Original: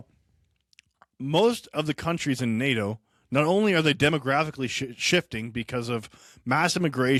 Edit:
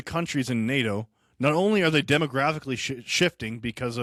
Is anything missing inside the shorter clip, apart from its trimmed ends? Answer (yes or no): no